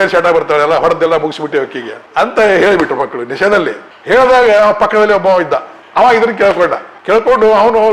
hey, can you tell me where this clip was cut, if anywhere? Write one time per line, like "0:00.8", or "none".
none